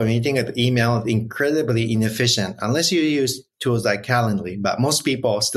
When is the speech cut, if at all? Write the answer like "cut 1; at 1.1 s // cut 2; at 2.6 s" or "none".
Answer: none